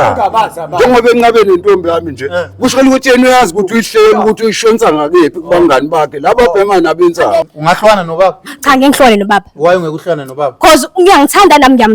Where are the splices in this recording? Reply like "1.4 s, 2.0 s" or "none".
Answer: 7.5 s

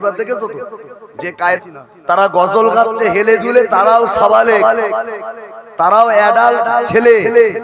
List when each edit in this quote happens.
1.6 s

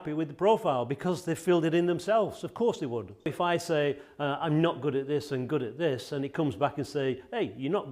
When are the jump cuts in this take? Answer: 3.3 s

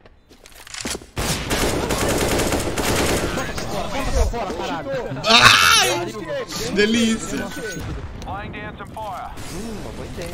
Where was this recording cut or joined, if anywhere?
7.8 s

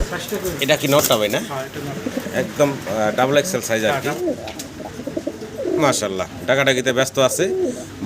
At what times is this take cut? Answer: 4.2 s

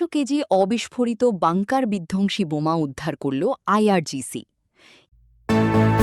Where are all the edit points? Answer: 4.9 s

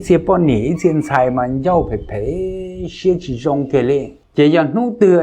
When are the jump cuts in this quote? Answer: 4.2 s

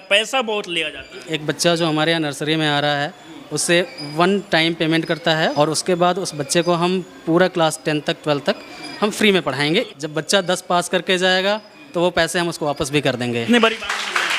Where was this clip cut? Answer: 1.3 s, 5.5 s, 9.9 s, 13.4 s

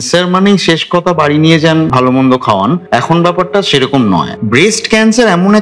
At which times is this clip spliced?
1.9 s, 2.8 s, 4.3 s

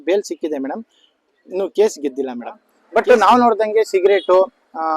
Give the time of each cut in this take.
2.7 s

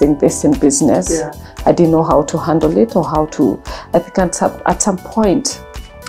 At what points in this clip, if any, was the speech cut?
none

